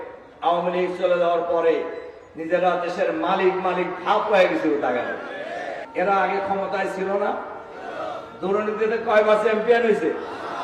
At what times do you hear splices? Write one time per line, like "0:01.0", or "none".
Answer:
0:05.7